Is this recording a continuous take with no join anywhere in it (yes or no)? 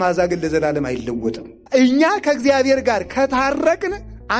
no